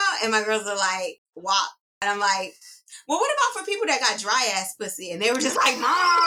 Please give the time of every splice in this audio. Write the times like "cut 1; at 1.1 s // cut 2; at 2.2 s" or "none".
cut 1; at 1.3 s // cut 2; at 2.0 s